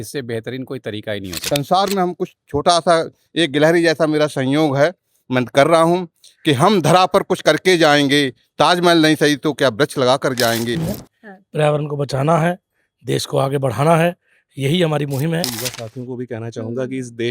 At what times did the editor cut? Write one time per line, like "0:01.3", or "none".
0:01.5
0:10.9
0:15.6